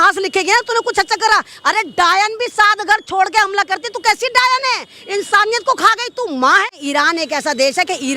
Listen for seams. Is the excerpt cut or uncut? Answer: cut